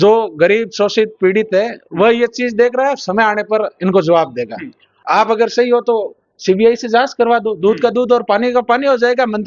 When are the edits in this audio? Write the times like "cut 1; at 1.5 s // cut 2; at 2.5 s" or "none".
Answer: cut 1; at 5.0 s